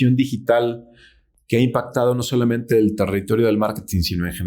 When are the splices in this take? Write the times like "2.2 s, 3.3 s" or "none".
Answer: none